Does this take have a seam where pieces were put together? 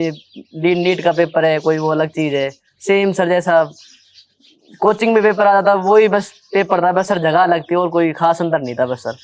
no; 0 cuts

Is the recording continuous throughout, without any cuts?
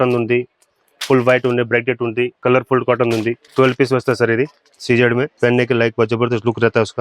no; 4 cuts; at 2.4 s, 3.4 s, 4.7 s, 5.3 s

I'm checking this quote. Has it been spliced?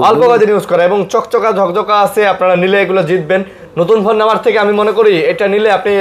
no; 0 cuts

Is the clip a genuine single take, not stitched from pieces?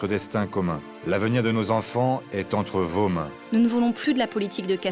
no; 2 cuts; at 0.9 s, 3.4 s

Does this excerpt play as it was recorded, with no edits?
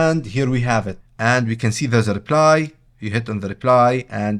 no; 1 cut; at 1.0 s

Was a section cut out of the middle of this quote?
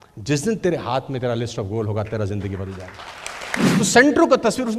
yes; 1 cut; at 3.8 s

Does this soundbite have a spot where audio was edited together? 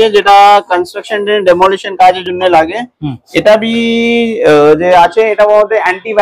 no; 0 cuts

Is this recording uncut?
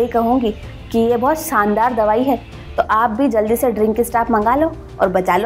yes; 0 cuts

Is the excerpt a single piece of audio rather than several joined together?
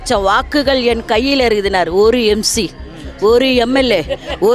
yes; 0 cuts

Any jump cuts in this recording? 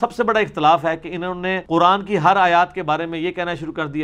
yes; 1 cut; at 1.6 s

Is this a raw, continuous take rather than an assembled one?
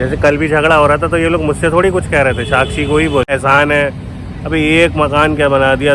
no; 1 cut; at 3.3 s

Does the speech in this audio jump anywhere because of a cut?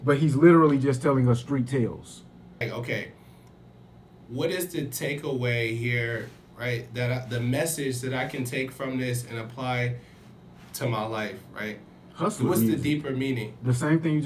yes; 1 cut; at 2.7 s

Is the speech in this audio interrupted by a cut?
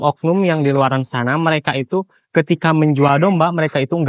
no; 0 cuts

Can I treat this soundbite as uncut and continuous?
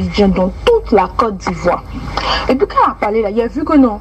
no; 1 cut; at 2.2 s

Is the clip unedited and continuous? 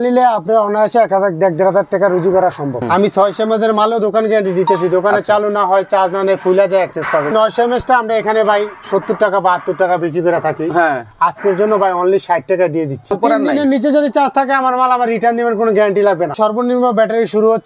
no; 4 cuts; at 2.8 s, 7.3 s, 13.1 s, 16.3 s

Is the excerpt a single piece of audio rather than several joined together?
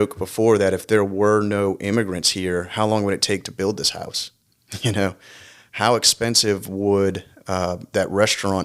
yes; 0 cuts

